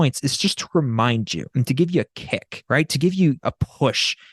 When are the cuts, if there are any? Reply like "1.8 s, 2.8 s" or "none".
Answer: 1.4 s, 2.5 s, 3.4 s